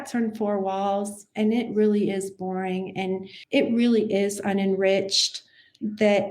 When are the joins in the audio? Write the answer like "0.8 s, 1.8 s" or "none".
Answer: 3.4 s